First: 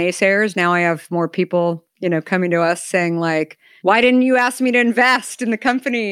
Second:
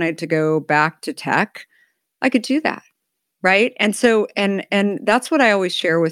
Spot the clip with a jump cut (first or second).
first